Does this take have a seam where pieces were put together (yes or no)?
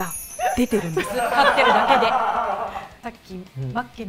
yes